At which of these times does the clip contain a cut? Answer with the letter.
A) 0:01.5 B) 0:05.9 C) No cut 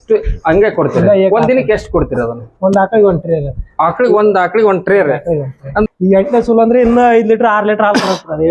B